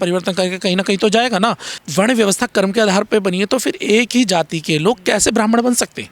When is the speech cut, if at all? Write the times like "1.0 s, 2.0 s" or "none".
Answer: 1.8 s